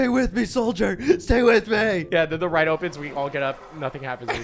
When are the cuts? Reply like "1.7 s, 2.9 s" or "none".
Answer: 2.1 s

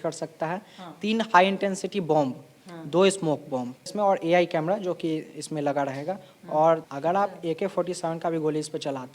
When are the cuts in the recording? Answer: 3.9 s, 6.9 s

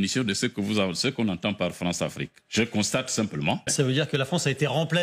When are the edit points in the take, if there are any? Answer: 3.7 s

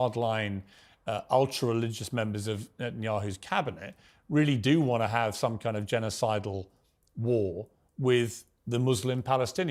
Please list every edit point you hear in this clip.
none

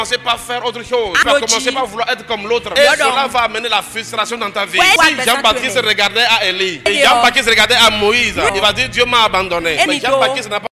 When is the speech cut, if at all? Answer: 1.2 s, 2.7 s, 5.0 s, 6.9 s, 8.5 s, 9.9 s

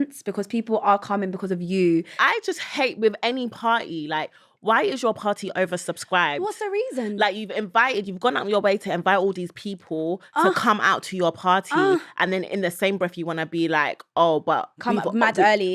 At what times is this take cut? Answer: 2.1 s

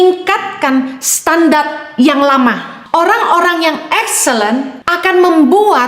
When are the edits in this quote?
2.7 s, 4.8 s

